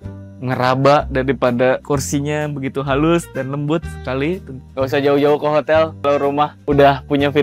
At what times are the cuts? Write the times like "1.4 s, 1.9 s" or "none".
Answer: 4.6 s, 6.1 s